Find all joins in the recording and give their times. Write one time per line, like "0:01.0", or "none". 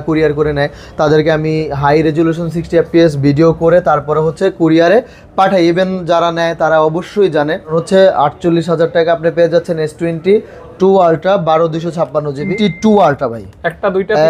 0:07.7
0:12.5